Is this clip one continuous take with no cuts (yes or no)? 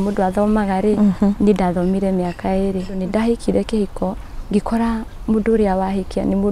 no